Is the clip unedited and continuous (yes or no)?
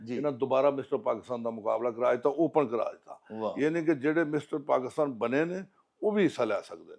yes